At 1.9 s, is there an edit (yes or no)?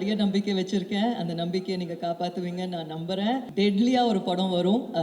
no